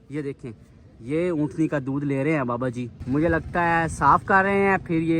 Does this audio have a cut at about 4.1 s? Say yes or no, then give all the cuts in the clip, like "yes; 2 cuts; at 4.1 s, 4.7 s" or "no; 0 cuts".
no; 1 cut; at 2.9 s